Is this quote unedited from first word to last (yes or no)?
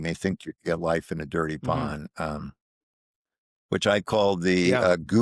yes